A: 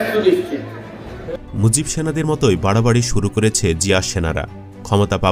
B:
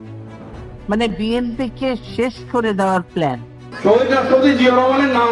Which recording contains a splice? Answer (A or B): B